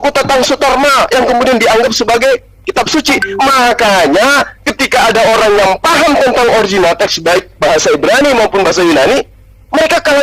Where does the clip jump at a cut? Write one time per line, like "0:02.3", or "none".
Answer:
none